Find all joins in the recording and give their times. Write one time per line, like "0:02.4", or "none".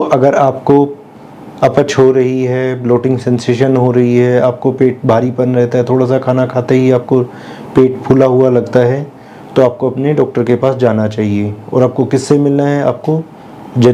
none